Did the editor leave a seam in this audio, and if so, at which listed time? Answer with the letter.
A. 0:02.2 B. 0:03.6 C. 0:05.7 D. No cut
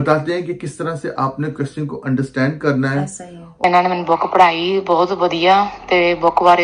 B